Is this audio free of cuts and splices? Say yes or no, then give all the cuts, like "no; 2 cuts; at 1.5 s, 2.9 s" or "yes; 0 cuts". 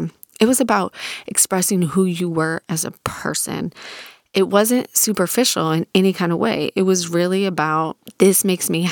no; 1 cut; at 8.0 s